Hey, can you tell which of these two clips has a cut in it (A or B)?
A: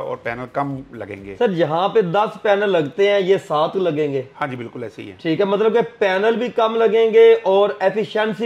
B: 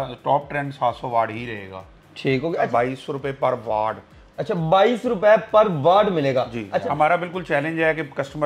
B